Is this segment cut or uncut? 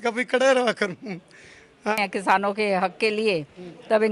cut